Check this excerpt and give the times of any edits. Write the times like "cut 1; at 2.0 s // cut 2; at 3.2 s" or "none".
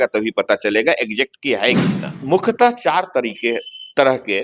cut 1; at 2.1 s